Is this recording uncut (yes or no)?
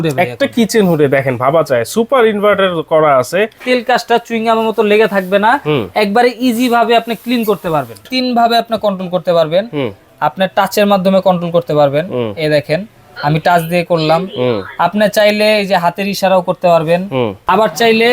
no